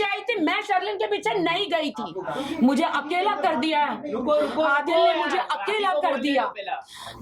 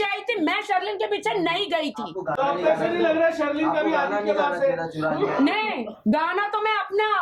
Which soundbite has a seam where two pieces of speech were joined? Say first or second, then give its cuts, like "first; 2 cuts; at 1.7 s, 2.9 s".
first; 1 cut; at 2.3 s